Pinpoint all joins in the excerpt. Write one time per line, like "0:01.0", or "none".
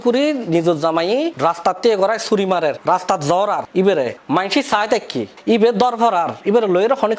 0:01.3
0:02.8
0:04.1